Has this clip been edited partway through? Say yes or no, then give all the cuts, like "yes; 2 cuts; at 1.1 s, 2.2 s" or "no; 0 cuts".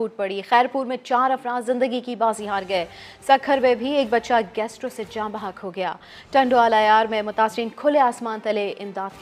no; 0 cuts